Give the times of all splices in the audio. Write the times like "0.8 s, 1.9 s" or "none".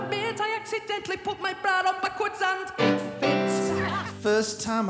3.9 s

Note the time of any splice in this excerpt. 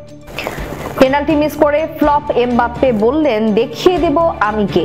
none

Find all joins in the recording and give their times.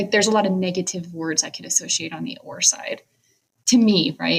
none

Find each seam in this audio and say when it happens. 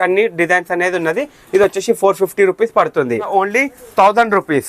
3.3 s

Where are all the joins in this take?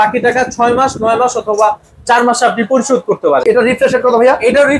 3.4 s

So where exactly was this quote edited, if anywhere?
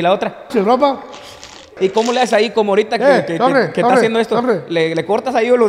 1.7 s

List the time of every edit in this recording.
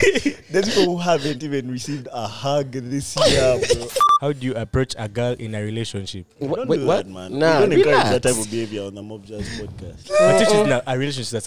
4.0 s, 6.4 s, 9.9 s

